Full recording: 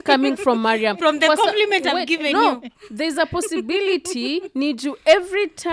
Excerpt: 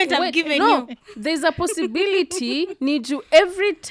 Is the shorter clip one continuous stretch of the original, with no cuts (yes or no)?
yes